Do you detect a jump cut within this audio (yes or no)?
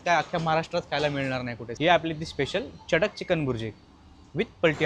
yes